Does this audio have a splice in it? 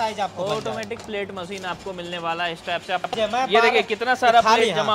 yes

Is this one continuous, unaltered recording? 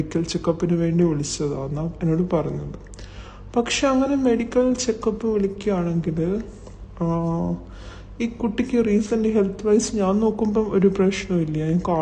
no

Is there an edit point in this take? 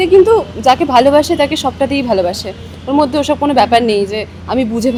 no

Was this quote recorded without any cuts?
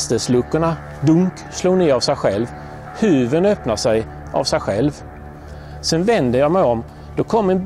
yes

